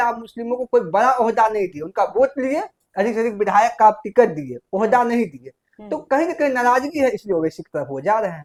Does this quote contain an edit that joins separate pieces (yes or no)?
no